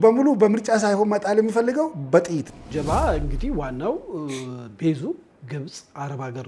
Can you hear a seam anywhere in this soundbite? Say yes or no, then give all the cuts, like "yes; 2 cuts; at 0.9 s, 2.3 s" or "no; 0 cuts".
yes; 1 cut; at 2.7 s